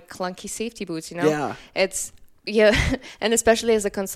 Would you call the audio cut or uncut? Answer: uncut